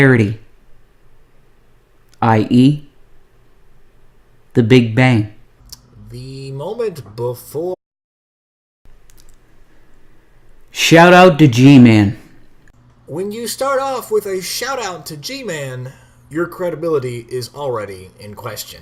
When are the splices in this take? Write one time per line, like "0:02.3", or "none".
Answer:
none

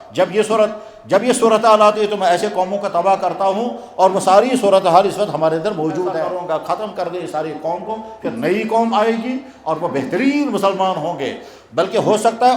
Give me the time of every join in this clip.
0:06.3

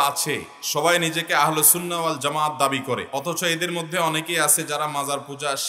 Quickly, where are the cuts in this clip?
0:03.1

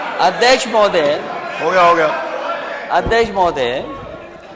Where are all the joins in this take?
none

